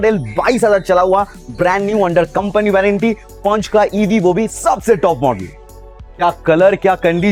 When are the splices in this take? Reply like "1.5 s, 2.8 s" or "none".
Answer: none